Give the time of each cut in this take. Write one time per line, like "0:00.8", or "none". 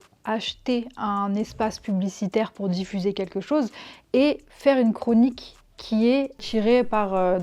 0:06.4